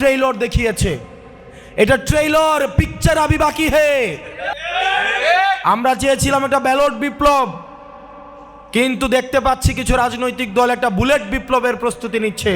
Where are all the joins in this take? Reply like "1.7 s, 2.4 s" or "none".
4.5 s